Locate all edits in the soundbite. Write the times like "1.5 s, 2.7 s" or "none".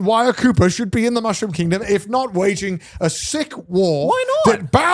none